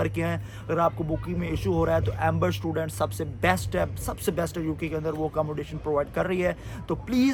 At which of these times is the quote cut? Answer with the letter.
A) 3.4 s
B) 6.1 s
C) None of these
C